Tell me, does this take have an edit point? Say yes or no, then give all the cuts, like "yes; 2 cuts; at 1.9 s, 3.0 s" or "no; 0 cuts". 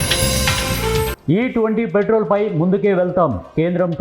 yes; 1 cut; at 1.2 s